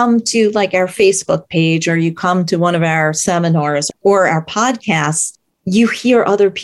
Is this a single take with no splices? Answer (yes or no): yes